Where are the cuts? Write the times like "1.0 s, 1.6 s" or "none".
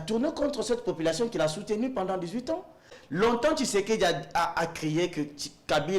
2.9 s